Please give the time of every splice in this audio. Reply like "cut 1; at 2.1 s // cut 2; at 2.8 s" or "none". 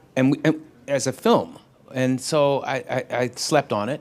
cut 1; at 1.2 s